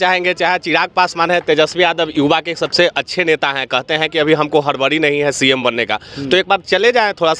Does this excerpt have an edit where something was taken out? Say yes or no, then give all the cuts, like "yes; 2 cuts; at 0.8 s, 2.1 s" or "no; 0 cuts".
no; 0 cuts